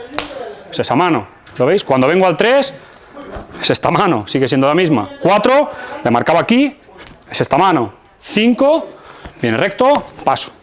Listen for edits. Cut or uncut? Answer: uncut